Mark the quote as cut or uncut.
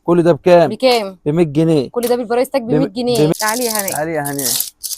cut